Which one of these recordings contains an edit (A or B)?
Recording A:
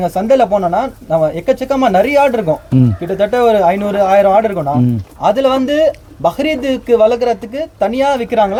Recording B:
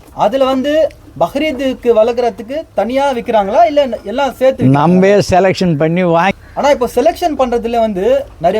B